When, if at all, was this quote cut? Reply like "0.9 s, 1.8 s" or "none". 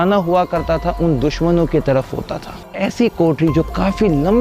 2.7 s